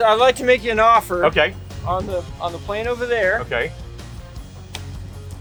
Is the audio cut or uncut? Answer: uncut